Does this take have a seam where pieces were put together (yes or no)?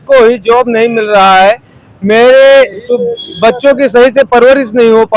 no